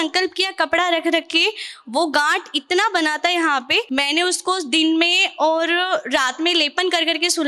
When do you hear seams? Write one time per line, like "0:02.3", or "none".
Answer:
0:03.9